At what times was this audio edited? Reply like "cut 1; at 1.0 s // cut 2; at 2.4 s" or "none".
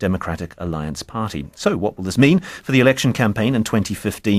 cut 1; at 1.2 s